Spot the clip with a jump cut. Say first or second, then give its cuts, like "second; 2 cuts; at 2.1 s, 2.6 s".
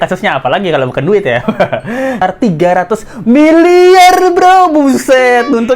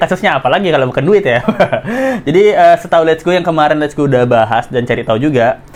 first; 1 cut; at 2.2 s